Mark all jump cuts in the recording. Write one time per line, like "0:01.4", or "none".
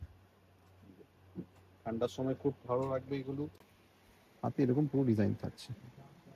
0:03.5